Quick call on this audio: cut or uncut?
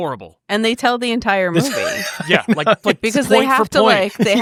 uncut